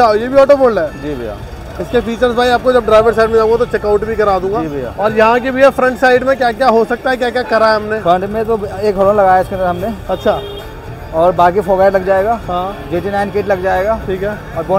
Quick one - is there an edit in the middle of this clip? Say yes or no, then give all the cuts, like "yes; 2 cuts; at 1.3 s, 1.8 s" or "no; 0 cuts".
no; 0 cuts